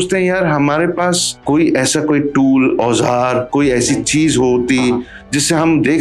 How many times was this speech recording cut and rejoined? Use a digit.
1